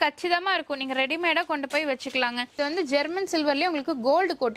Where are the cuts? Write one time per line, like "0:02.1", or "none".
0:02.6